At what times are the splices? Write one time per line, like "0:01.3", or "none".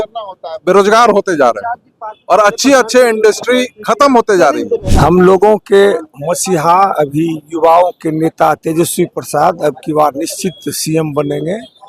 0:04.8